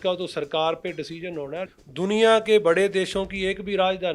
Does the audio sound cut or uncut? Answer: cut